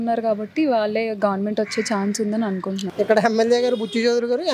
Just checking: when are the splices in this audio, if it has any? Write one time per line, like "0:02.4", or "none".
0:02.8